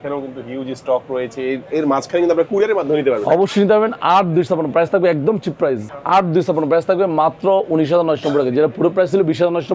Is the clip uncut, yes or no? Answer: yes